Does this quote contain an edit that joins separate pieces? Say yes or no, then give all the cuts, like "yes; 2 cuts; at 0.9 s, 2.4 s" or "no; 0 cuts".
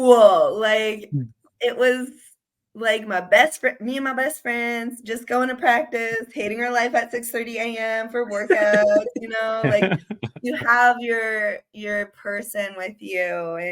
no; 0 cuts